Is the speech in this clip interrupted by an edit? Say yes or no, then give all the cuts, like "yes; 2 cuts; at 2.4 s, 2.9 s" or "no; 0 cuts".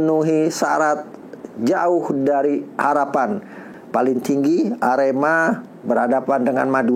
yes; 1 cut; at 3.7 s